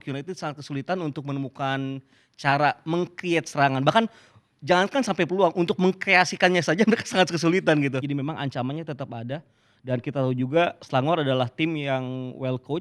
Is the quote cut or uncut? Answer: cut